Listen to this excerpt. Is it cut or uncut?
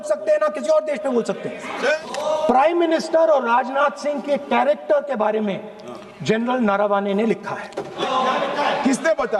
cut